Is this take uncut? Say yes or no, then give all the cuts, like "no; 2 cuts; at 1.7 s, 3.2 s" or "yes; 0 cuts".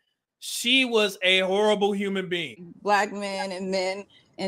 no; 1 cut; at 2.5 s